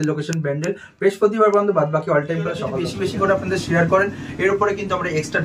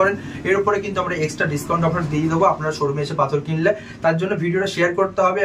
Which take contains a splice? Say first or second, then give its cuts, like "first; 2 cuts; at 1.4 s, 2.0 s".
first; 1 cut; at 2.7 s